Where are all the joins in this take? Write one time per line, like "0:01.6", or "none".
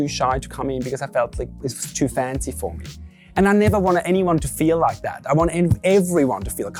none